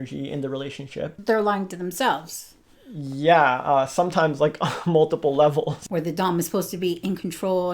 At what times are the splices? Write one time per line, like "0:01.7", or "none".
0:01.2
0:05.8